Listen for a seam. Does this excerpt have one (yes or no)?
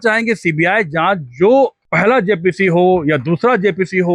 no